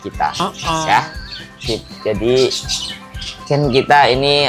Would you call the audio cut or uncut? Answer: uncut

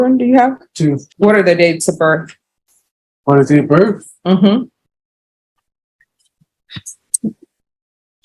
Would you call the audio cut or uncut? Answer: cut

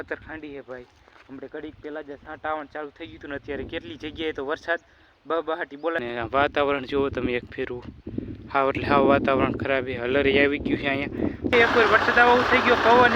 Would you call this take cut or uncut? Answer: cut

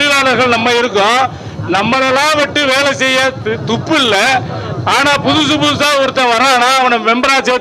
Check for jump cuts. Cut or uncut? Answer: uncut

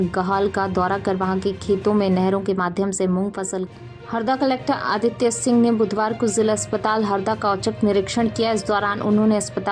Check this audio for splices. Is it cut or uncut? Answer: cut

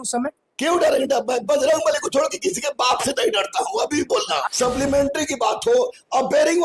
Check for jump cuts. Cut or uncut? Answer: cut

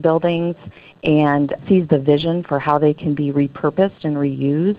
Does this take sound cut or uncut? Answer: cut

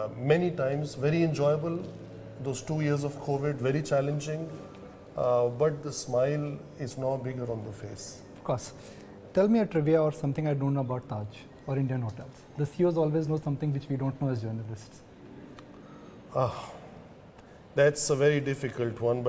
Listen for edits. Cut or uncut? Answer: cut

